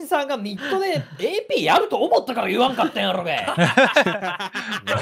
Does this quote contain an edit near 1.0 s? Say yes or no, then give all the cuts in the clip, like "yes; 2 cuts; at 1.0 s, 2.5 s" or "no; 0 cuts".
no; 0 cuts